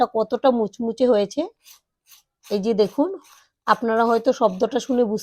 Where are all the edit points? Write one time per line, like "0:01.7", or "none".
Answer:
none